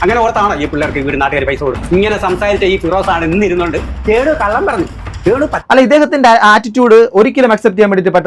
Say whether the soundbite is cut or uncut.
uncut